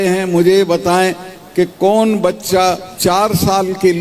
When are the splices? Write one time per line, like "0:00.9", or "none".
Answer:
0:02.9